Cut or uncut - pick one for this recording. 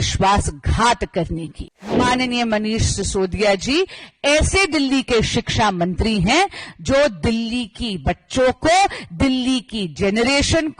cut